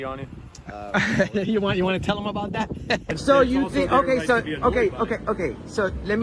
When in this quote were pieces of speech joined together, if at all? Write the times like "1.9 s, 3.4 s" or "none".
3.1 s